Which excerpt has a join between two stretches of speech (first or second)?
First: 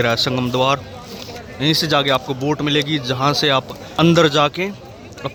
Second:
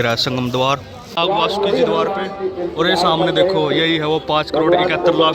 second